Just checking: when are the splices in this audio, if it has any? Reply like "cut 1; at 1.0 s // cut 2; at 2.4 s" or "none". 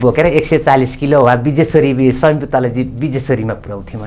none